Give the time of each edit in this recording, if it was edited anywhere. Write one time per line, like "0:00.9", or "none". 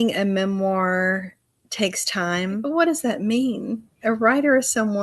0:02.6